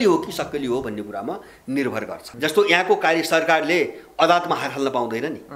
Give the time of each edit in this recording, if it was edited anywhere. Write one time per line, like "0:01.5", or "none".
0:02.2